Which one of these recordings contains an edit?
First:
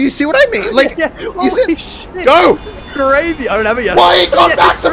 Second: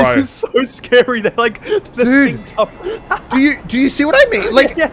first; 1 cut; at 2.0 s

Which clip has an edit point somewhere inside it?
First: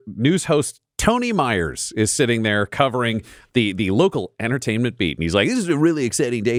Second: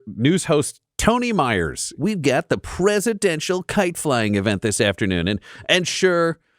second; 1 cut; at 1.9 s

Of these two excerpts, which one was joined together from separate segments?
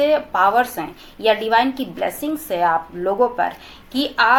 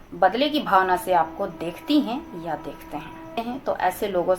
second; 1 cut; at 3.4 s

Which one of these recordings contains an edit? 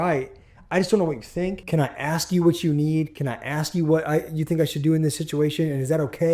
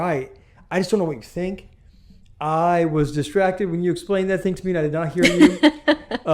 first; 1 cut; at 1.6 s

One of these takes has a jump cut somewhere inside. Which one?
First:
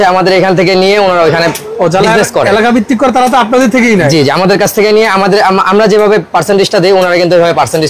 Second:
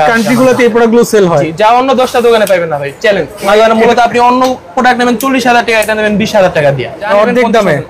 second; 2 cuts; at 3.5 s, 7.0 s

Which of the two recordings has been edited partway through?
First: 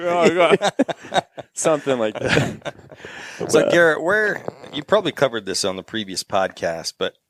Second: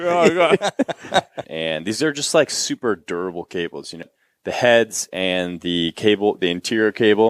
second; 2 cuts; at 1.4 s, 4.1 s

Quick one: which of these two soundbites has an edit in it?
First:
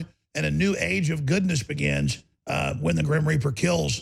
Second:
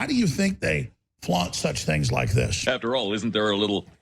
second; 1 cut; at 2.6 s

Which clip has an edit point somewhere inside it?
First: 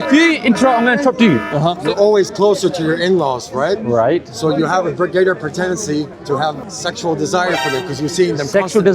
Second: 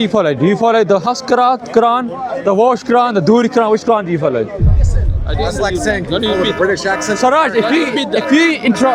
first; 2 cuts; at 1.8 s, 6.3 s

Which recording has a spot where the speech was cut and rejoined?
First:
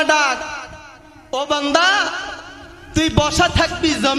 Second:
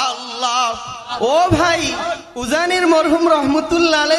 second; 2 cuts; at 1.1 s, 2.3 s

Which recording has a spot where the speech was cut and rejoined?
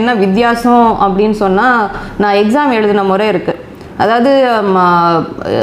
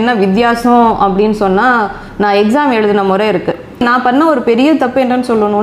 second; 1 cut; at 3.8 s

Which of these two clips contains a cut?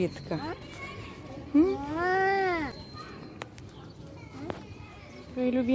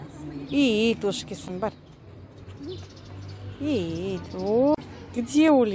second; 1 cut; at 4.8 s

